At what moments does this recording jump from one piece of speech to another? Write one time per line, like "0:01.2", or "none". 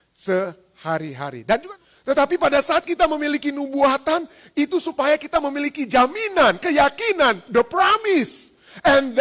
0:01.7